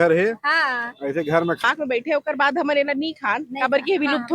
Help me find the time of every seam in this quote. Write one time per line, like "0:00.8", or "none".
0:01.6